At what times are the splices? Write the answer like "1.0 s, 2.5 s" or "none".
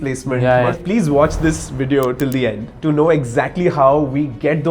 0.8 s, 2.7 s